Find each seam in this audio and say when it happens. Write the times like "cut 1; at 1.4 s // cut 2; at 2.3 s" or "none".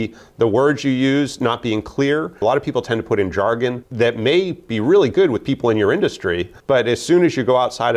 cut 1; at 2.4 s // cut 2; at 3.8 s // cut 3; at 6.5 s